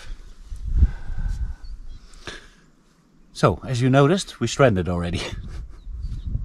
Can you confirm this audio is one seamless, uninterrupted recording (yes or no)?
yes